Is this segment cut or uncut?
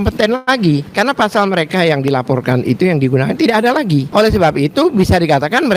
cut